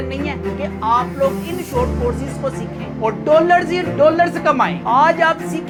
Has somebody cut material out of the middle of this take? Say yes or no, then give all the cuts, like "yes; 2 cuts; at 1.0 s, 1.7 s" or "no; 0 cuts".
no; 0 cuts